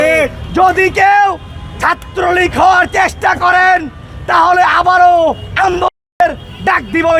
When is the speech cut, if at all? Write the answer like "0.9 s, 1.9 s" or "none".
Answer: none